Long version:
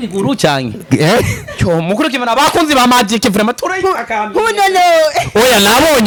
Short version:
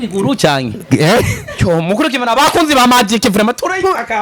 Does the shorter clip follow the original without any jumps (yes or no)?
yes